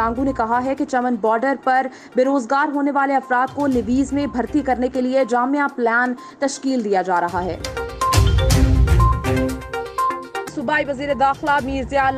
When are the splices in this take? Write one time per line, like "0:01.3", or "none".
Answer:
0:07.6
0:10.6